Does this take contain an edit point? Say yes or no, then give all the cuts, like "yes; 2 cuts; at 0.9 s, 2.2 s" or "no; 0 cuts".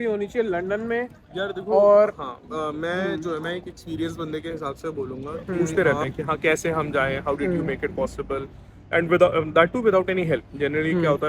yes; 1 cut; at 5.7 s